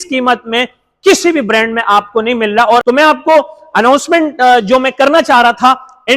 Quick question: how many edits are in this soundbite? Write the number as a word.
one